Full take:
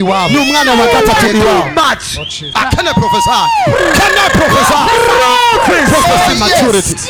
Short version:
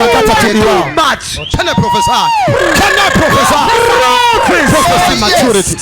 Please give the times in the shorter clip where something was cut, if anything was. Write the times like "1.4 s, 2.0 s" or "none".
1.5 s